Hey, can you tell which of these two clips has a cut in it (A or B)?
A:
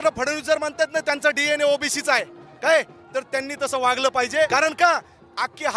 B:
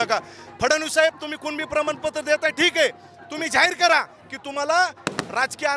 A